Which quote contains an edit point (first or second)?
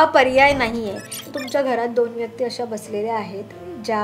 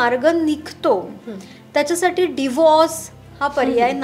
first